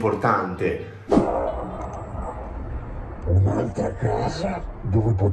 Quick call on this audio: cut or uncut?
cut